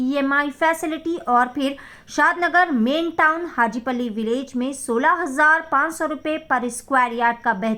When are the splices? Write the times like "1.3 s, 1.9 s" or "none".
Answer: none